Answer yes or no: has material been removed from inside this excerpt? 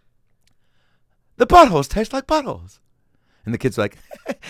no